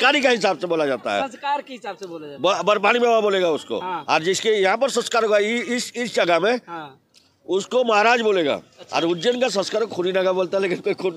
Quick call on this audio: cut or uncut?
uncut